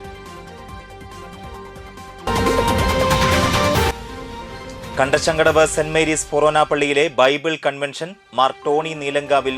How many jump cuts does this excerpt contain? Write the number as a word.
one